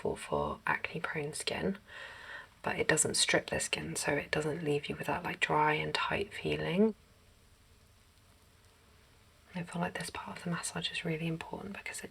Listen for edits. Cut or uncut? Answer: cut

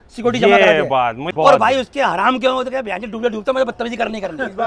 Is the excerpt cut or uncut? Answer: cut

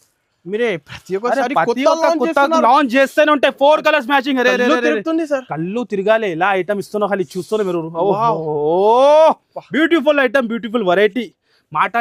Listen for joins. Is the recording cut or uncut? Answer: uncut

